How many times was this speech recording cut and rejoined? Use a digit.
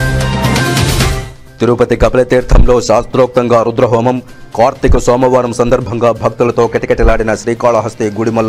1